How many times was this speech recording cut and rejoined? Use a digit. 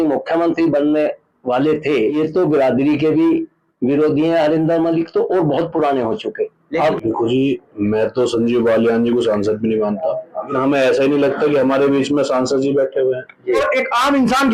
4